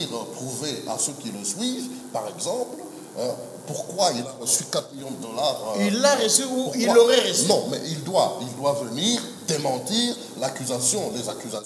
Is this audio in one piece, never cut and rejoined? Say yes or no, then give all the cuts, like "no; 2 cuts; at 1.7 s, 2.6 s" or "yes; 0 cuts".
yes; 0 cuts